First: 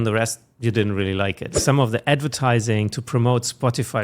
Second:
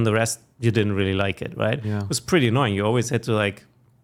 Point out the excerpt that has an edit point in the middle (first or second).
first